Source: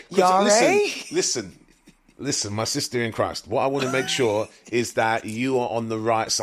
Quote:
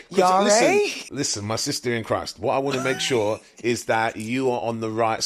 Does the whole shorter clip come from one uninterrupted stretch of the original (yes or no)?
no